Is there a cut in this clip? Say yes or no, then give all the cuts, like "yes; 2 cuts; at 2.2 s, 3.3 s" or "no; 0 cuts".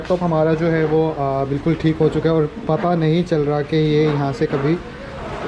no; 0 cuts